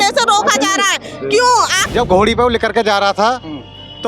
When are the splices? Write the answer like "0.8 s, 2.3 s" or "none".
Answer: 1.8 s